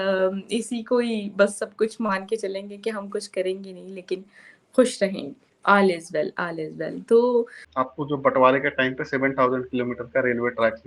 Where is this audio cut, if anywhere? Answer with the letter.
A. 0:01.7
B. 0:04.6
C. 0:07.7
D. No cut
C